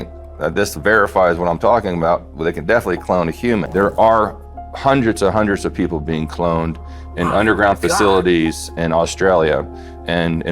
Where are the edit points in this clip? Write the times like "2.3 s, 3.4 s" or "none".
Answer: 3.7 s